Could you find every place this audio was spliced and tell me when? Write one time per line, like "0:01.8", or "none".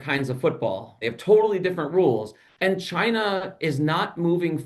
0:00.9
0:02.4